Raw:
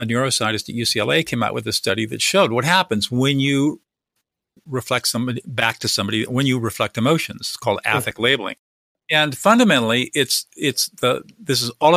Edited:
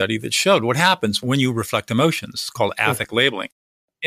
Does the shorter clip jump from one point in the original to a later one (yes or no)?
yes